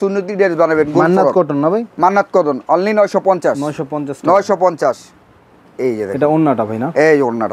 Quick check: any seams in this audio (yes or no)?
no